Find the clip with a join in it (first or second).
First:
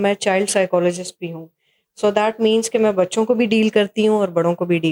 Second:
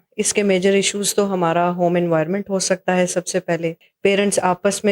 second